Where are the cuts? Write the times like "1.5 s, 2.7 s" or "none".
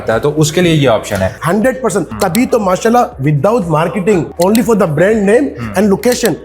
1.4 s, 2.1 s, 4.3 s